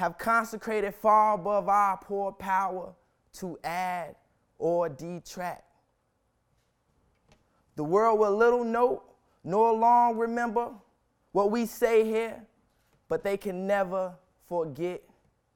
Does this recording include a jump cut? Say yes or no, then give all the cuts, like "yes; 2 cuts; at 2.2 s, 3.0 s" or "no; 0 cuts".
no; 0 cuts